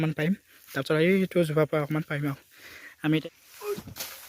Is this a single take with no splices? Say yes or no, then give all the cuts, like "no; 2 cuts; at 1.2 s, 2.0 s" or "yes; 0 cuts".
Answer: no; 1 cut; at 3.2 s